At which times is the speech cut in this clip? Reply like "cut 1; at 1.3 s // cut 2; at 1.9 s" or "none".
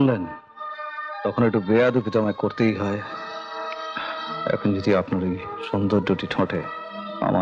none